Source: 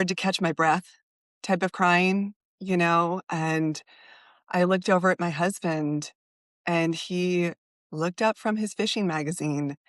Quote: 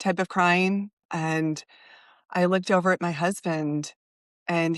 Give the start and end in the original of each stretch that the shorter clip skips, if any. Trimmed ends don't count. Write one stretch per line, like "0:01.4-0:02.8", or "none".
0:02.5-0:03.3